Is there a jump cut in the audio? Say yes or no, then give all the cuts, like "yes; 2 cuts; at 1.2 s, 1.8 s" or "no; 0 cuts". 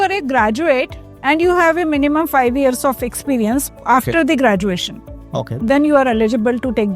no; 0 cuts